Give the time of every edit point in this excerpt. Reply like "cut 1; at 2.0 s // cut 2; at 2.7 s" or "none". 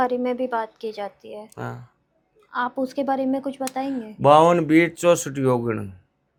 none